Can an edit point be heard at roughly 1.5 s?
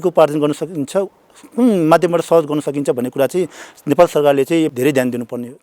no; 1 cut; at 4.7 s

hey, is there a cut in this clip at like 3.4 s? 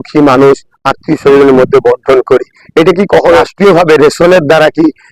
yes; 1 cut; at 3.4 s

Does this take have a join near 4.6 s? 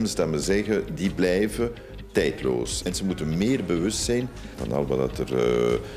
no; 1 cut; at 2.7 s

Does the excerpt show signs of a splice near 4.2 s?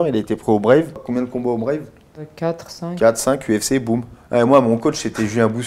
yes; 3 cuts; at 1.0 s, 2.3 s, 4.2 s

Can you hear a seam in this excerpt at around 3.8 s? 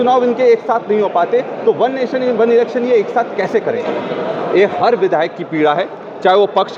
no; 0 cuts

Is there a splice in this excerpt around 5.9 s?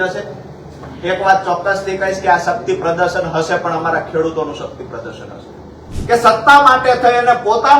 yes; 1 cut; at 5.9 s

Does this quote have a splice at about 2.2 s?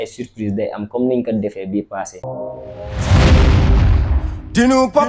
yes; 1 cut; at 2.2 s

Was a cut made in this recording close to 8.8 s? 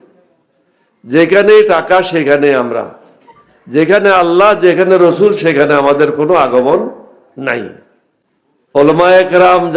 yes; 1 cut; at 8.8 s

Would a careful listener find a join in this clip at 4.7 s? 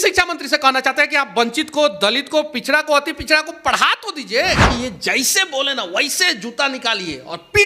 yes; 1 cut; at 4.7 s

